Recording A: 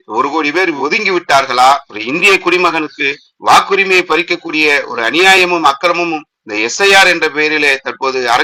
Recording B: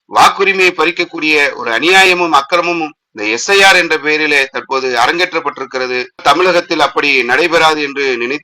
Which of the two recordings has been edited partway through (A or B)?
B